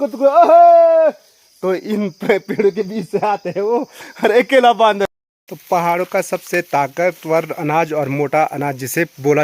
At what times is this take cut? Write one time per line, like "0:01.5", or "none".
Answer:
0:05.0